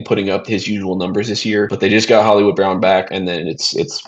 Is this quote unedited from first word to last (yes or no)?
no